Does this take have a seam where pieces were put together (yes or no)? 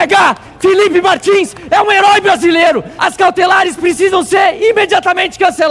yes